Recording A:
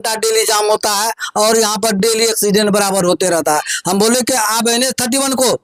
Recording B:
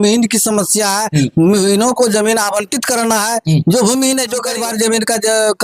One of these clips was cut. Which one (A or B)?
B